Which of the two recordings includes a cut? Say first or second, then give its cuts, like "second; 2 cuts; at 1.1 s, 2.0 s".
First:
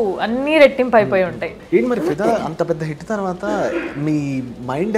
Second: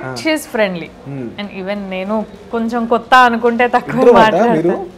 first; 1 cut; at 1.5 s